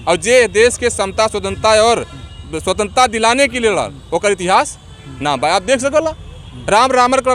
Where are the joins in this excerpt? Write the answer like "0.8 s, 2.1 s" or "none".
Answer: none

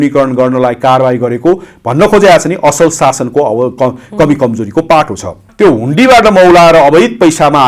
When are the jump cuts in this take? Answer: 5.5 s

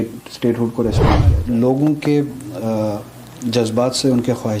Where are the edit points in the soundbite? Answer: 1.3 s

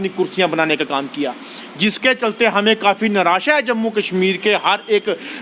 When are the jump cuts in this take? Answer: none

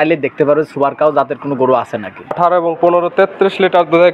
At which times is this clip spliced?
2.3 s

